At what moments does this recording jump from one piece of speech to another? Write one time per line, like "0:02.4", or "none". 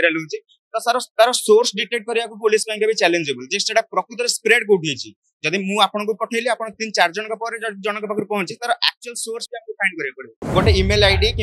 0:10.4